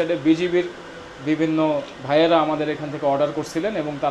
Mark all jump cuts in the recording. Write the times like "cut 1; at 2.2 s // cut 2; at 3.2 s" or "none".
none